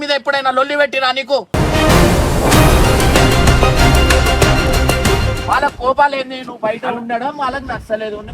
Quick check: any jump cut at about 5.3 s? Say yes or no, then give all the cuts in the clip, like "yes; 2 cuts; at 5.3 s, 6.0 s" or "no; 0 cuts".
yes; 1 cut; at 5.3 s